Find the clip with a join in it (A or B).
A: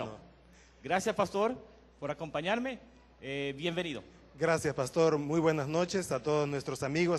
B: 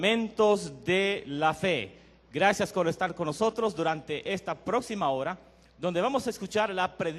A